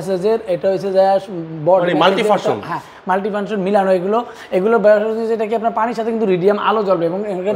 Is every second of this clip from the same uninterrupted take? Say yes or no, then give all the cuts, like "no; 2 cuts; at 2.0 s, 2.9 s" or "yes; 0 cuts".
yes; 0 cuts